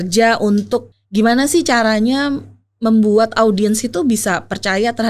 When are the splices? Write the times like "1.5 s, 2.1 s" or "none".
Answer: 0.9 s